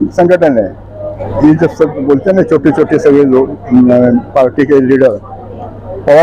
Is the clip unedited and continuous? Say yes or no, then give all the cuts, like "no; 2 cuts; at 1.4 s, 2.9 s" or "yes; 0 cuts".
no; 1 cut; at 1.2 s